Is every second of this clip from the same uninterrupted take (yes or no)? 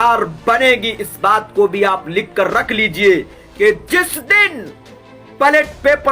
no